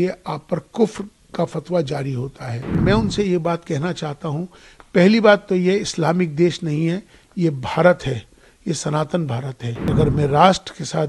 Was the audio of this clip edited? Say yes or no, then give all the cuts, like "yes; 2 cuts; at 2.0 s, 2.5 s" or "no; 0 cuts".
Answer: yes; 2 cuts; at 2.7 s, 9.9 s